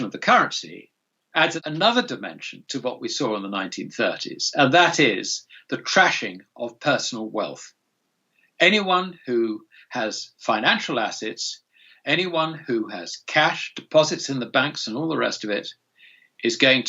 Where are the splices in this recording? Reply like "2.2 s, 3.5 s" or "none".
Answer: 1.6 s